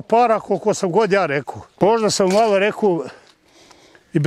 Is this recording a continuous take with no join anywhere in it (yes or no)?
no